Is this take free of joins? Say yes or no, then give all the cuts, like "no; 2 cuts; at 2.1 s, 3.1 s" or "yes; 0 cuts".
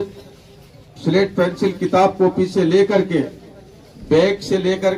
yes; 0 cuts